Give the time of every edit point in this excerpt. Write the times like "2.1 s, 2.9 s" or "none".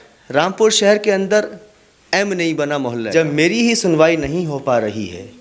3.1 s